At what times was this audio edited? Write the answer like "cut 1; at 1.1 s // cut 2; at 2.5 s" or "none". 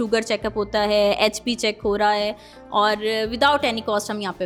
none